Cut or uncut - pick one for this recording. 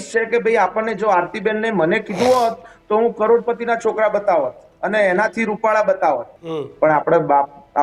cut